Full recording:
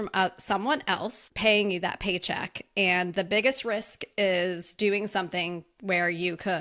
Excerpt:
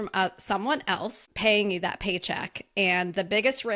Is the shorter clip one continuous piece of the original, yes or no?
yes